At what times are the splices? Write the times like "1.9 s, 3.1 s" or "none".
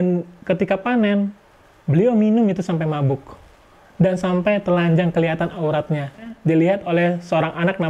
6.3 s